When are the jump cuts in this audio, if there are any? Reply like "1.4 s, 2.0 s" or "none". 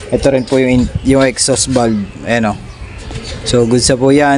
none